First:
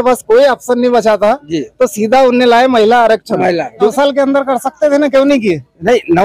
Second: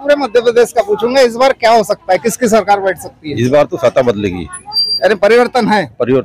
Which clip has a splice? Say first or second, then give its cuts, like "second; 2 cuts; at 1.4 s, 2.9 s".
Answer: first; 1 cut; at 3.9 s